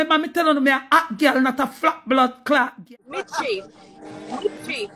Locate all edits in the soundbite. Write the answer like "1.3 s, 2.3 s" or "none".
2.8 s